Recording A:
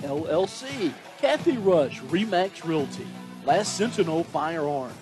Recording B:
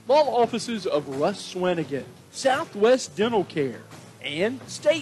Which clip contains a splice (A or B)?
A